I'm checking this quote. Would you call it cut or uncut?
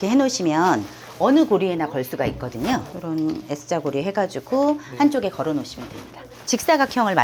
cut